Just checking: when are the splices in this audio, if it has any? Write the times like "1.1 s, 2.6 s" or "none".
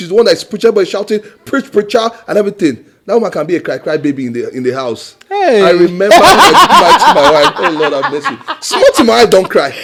none

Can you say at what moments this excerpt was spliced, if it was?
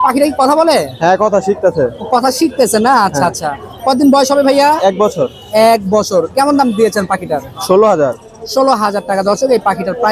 none

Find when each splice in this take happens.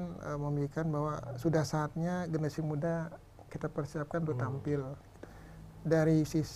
5.1 s

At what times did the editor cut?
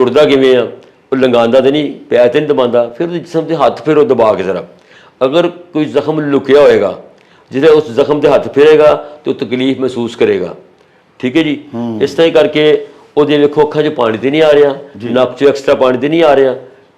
none

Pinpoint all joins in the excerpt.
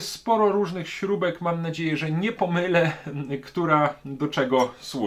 none

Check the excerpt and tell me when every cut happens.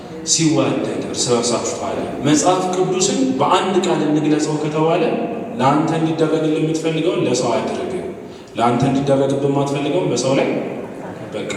2.1 s

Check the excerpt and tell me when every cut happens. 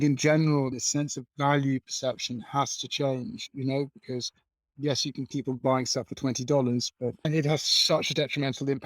7.3 s

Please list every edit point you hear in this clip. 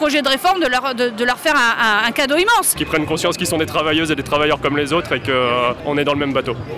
2.8 s, 5.8 s

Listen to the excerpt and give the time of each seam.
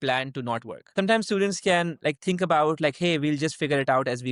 0.9 s

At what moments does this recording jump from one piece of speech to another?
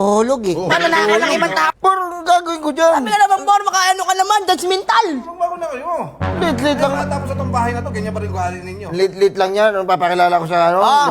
1.7 s

